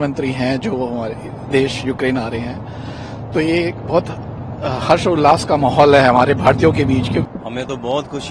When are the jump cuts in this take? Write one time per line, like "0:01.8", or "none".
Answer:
0:07.2